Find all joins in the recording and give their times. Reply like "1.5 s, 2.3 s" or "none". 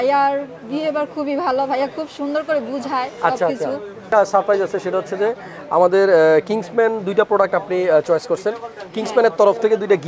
4.1 s